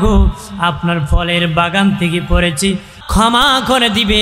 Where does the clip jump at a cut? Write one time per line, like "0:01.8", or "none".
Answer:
0:02.9